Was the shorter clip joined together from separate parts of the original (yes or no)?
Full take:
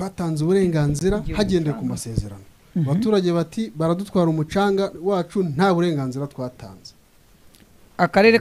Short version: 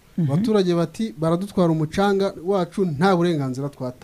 no